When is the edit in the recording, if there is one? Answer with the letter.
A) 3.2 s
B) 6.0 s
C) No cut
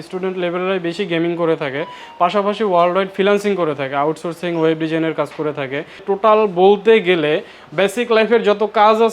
B